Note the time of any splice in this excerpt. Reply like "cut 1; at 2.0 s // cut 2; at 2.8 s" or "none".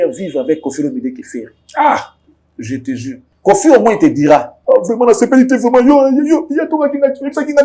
none

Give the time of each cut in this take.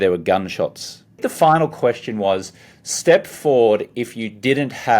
cut 1; at 1.2 s // cut 2; at 3.9 s

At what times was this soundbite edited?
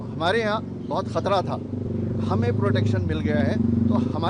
cut 1; at 1.9 s

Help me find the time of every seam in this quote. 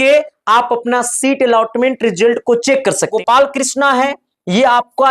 cut 1; at 3.1 s

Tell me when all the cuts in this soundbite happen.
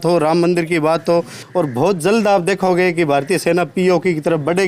cut 1; at 1.4 s

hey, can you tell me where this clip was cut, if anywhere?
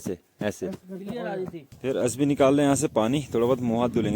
cut 1; at 1.6 s

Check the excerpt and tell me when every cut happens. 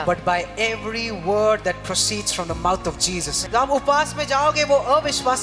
cut 1; at 3.4 s

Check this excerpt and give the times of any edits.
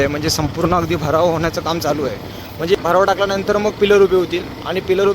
cut 1; at 2.8 s

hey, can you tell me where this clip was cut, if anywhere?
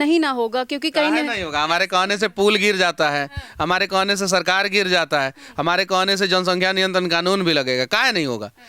none

